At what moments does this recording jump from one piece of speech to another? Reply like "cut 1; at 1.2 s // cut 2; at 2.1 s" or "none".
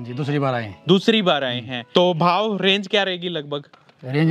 cut 1; at 1.8 s